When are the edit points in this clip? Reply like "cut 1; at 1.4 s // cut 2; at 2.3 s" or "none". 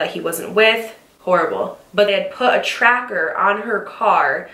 cut 1; at 2.1 s

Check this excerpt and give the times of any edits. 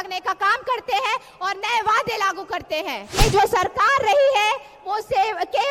cut 1; at 3.0 s

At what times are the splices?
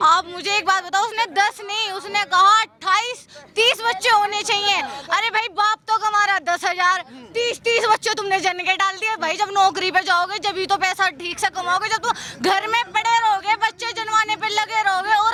none

